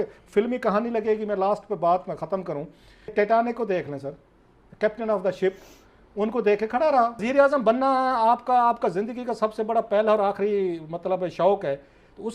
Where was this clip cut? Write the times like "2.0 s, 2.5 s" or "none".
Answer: 3.1 s, 7.2 s